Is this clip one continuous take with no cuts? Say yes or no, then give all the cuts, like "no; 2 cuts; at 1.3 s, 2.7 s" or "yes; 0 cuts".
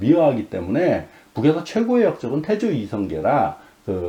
yes; 0 cuts